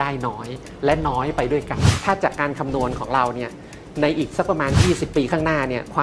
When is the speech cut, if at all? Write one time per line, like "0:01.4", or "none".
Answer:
0:01.9